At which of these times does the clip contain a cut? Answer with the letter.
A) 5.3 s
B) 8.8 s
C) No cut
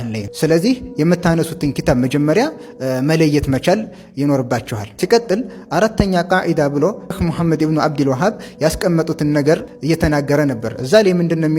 C